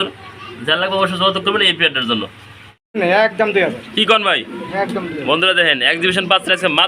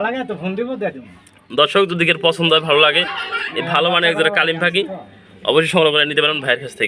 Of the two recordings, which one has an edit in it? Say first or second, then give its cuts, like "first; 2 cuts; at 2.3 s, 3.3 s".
first; 1 cut; at 3.0 s